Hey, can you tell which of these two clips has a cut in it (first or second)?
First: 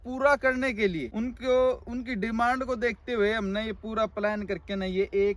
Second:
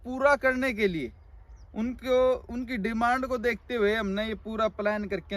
first